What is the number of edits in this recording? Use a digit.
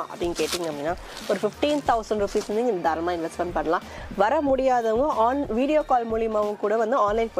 0